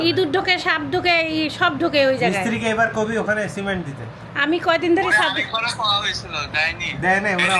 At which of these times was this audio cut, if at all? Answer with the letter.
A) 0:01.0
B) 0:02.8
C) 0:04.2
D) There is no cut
D